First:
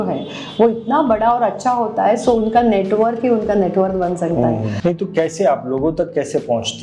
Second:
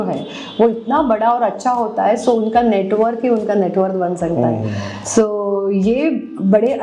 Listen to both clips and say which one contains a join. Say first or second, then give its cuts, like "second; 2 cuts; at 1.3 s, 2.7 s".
first; 1 cut; at 4.7 s